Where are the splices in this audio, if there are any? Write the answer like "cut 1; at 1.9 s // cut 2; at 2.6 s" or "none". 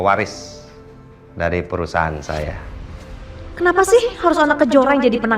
cut 1; at 2.9 s